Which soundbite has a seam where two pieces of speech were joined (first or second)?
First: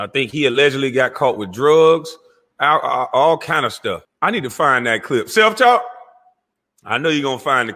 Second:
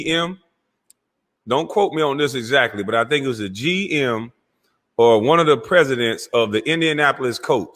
first